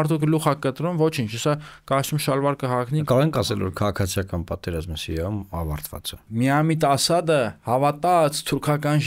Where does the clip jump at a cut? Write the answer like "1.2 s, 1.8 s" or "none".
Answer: 3.0 s, 6.2 s

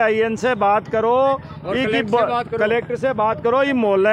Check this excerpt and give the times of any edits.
none

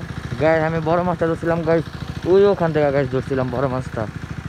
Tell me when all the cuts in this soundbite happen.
none

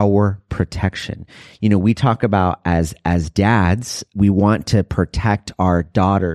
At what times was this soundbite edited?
4.1 s

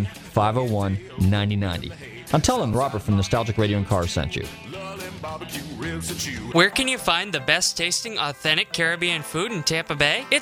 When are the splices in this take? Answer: 6.3 s

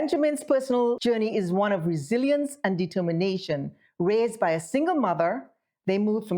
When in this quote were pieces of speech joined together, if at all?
1.0 s

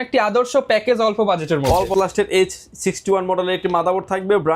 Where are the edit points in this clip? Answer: 1.9 s

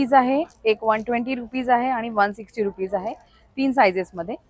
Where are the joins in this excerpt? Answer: none

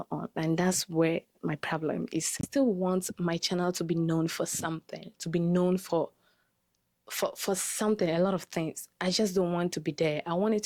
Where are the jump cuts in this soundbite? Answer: 2.4 s

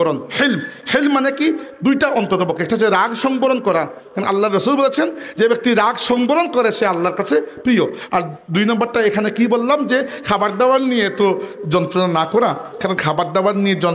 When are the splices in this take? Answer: none

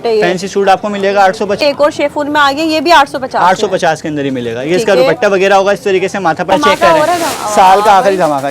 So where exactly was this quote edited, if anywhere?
1.6 s, 6.5 s

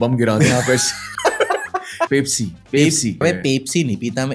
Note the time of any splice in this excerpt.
1.0 s, 2.1 s, 3.2 s

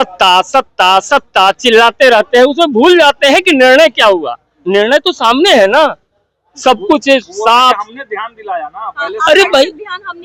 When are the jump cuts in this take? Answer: none

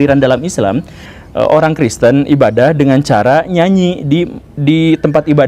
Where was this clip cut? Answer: 1.0 s

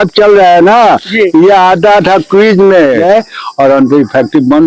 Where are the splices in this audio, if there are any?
3.0 s

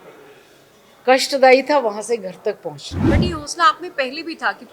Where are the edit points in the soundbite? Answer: 2.9 s

